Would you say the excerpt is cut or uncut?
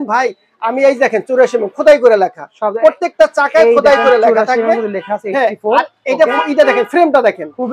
uncut